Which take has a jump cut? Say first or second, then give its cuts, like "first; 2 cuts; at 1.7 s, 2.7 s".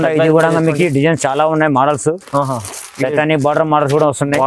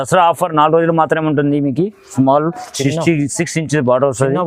second; 1 cut; at 2.1 s